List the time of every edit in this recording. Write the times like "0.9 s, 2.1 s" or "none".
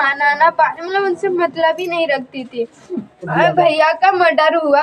3.3 s